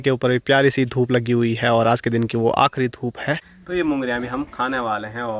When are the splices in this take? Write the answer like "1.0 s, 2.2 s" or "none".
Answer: 3.5 s